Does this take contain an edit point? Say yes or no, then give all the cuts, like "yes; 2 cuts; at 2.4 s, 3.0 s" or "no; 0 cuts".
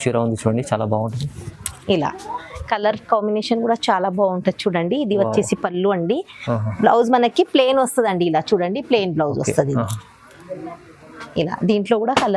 no; 0 cuts